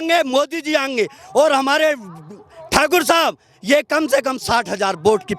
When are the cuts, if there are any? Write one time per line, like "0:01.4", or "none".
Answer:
none